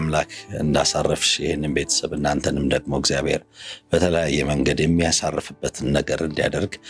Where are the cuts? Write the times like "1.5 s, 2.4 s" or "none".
none